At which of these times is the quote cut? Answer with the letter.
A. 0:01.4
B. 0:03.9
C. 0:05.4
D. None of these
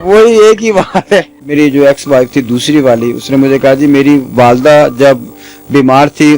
A